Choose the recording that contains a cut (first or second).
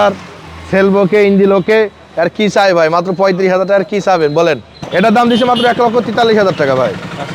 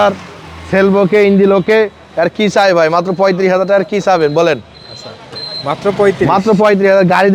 first